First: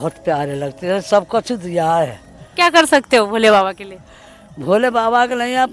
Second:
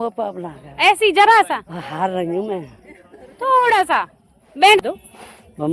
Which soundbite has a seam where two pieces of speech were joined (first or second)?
second